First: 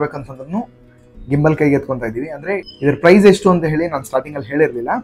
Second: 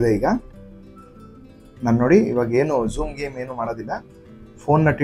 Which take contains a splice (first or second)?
first